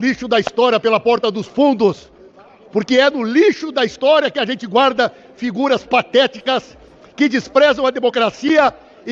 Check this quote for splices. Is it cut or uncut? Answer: uncut